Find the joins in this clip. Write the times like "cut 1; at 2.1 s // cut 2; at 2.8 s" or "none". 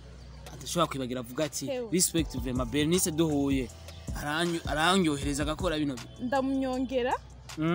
cut 1; at 6.1 s